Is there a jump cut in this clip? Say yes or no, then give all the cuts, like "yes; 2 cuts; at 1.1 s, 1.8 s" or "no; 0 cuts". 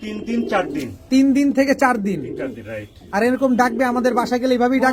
no; 0 cuts